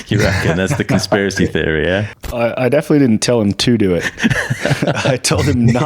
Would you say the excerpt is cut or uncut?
cut